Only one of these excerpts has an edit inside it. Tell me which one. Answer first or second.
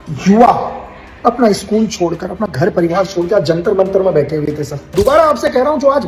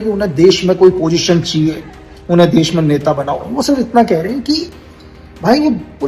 first